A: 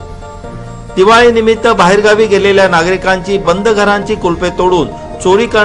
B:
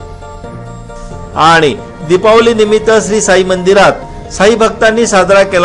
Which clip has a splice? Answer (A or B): A